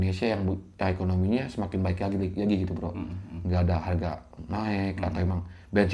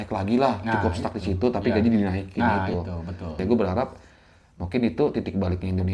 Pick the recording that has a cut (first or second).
second